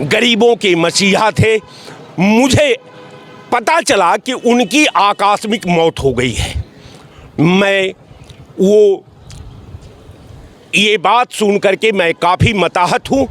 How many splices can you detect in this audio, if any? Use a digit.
0